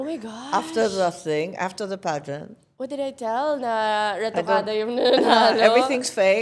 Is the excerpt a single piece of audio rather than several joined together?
yes; 0 cuts

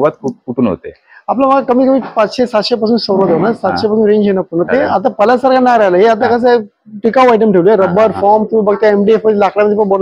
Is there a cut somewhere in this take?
yes; 1 cut; at 4.7 s

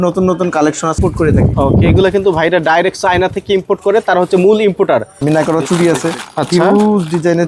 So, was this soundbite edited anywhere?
yes; 2 cuts; at 1.0 s, 5.1 s

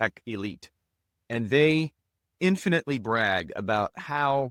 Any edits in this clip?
no; 0 cuts

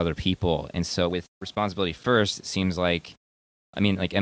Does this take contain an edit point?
no; 0 cuts

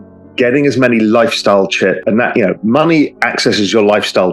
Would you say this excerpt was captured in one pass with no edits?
no; 1 cut; at 2.0 s

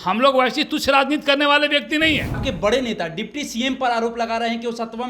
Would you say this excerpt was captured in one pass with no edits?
no; 1 cut; at 2.4 s

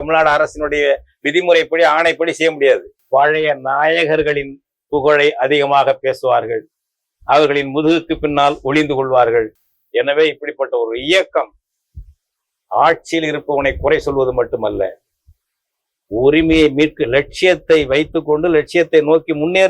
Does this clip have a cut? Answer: yes; 2 cuts; at 2.9 s, 9.6 s

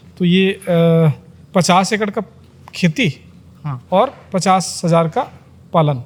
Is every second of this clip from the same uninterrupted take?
yes; 0 cuts

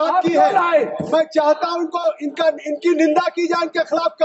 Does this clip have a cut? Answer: no; 0 cuts

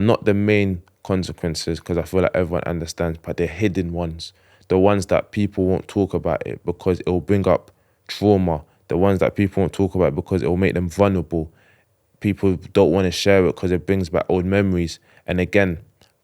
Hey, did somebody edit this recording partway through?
no; 0 cuts

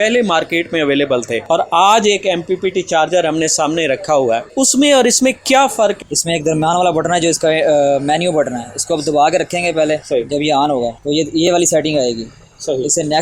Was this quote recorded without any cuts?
no; 5 cuts; at 1.4 s, 4.5 s, 6.0 s, 10.0 s, 11.0 s

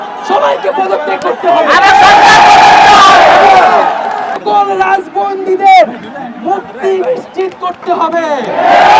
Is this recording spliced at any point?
yes; 1 cut; at 4.4 s

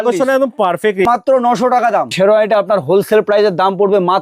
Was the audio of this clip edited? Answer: yes; 2 cuts; at 1.0 s, 2.1 s

